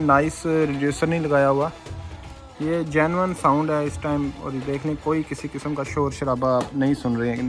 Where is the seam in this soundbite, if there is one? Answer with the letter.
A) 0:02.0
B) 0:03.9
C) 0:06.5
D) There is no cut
D